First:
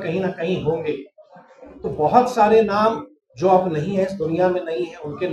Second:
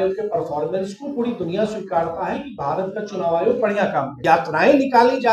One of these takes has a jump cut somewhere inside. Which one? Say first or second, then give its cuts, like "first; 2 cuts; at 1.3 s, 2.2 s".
second; 1 cut; at 4.1 s